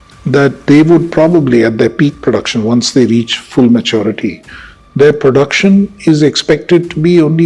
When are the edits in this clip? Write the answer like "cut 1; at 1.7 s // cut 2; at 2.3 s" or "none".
none

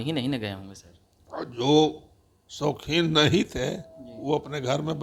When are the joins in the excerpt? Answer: none

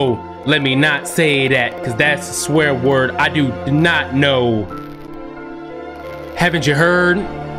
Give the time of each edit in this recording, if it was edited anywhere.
none

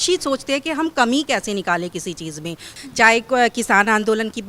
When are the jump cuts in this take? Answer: cut 1; at 2.7 s

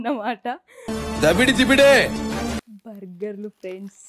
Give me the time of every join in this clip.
cut 1; at 2.7 s

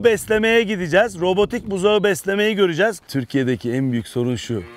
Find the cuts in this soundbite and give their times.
cut 1; at 3.1 s

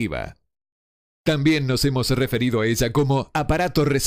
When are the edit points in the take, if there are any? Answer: cut 1; at 1.6 s

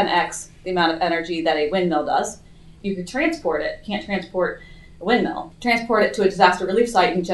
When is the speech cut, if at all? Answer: cut 1; at 2.7 s // cut 2; at 5.5 s

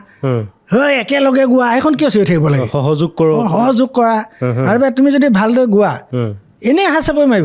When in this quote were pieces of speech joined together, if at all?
none

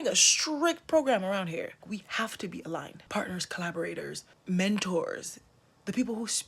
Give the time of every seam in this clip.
cut 1; at 1.8 s // cut 2; at 3.0 s // cut 3; at 4.3 s

